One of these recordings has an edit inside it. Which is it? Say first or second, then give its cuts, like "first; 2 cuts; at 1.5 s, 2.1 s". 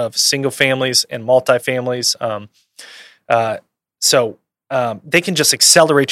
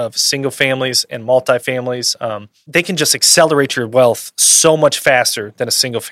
second; 1 cut; at 2.6 s